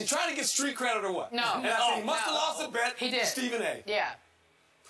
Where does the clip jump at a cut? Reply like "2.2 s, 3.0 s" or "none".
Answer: 3.0 s